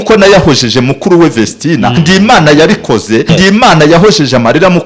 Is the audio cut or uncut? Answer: cut